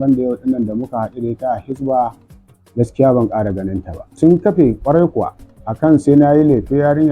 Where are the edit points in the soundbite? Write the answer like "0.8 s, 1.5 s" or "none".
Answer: 4.2 s